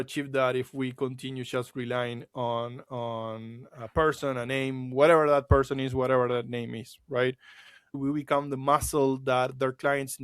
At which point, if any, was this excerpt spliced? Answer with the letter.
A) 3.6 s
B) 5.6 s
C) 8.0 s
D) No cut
C